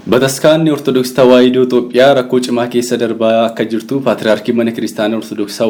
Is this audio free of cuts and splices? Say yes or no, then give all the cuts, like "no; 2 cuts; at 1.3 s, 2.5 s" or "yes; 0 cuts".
yes; 0 cuts